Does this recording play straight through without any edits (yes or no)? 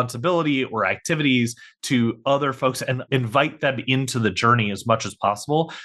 no